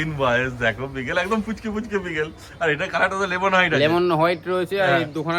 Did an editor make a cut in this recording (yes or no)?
no